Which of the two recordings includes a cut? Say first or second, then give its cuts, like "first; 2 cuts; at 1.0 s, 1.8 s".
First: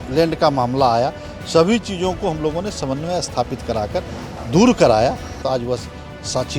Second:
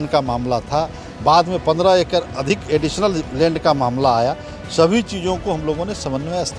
first; 1 cut; at 5.4 s